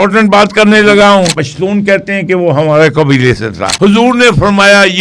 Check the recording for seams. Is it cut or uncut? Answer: cut